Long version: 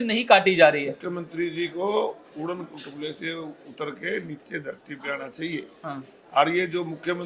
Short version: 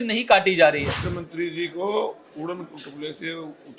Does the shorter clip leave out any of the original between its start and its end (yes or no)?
no